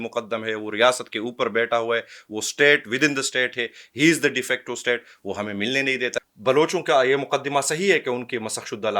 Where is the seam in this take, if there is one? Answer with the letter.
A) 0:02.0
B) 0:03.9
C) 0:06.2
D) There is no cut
C